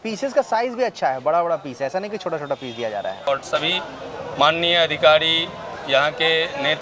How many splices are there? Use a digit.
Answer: 1